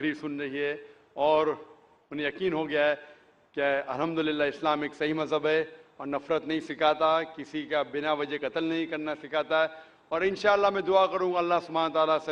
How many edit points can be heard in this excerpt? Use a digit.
1